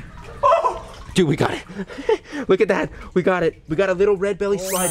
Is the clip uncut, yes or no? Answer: yes